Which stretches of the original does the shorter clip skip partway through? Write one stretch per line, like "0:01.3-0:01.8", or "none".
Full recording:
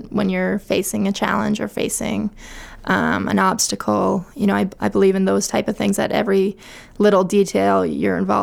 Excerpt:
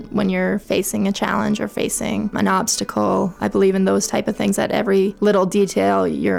0:02.3-0:03.2
0:04.3-0:04.8
0:06.5-0:06.9

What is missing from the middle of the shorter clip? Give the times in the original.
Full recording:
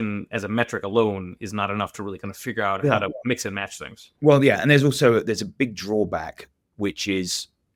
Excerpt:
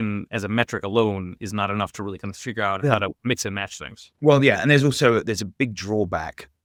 none

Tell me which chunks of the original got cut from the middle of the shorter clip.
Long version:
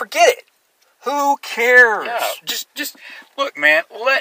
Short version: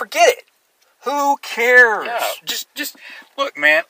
none

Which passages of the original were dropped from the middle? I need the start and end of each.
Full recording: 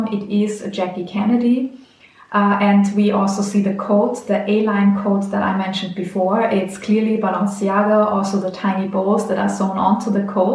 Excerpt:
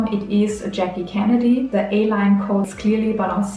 0:01.7-0:04.2
0:05.3-0:06.8

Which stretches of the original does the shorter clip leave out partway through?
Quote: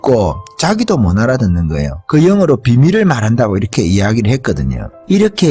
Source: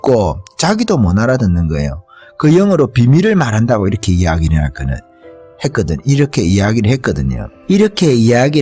0:01.9-0:02.2
0:04.0-0:06.3

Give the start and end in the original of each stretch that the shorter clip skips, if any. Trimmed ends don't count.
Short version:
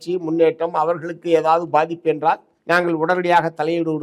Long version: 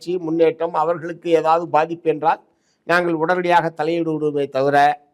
0:02.5-0:02.7

